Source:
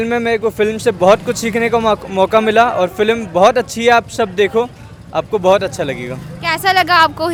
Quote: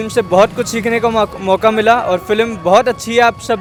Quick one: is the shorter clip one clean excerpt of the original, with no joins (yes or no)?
yes